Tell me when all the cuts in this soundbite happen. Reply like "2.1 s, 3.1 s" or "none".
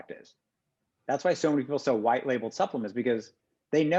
none